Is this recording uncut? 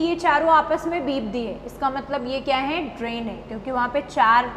yes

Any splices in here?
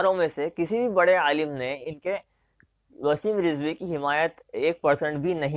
no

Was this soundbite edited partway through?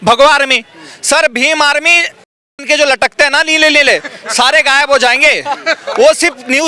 no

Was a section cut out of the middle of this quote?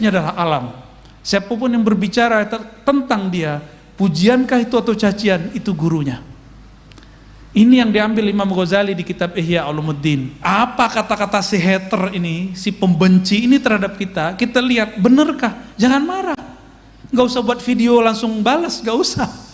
yes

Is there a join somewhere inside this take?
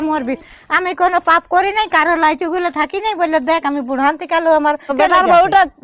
yes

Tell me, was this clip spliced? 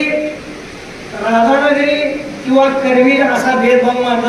no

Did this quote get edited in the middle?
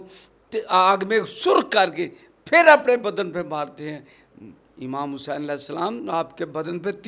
no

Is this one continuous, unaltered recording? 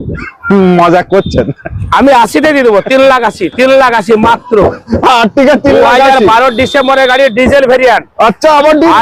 yes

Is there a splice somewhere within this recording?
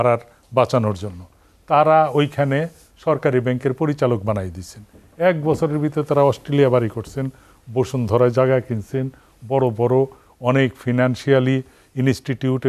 no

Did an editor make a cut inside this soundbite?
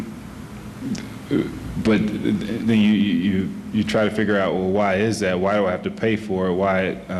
yes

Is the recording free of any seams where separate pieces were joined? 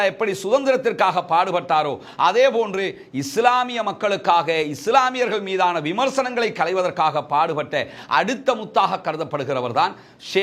yes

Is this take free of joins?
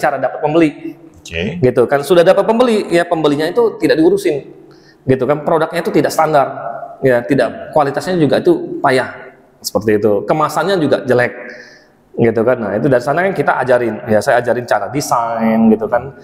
yes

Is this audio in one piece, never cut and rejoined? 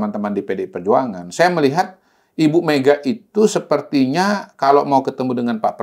yes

